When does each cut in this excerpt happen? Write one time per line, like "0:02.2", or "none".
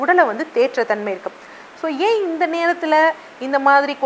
none